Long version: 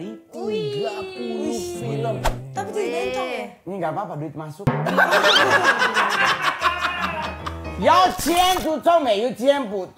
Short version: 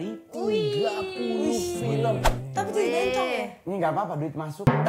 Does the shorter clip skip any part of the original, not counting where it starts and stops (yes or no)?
no